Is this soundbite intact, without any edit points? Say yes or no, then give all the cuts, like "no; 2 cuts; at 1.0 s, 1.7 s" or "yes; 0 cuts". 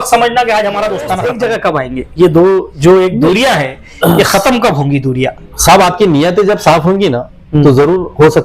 no; 1 cut; at 1.2 s